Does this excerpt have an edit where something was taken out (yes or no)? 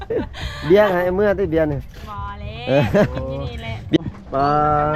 yes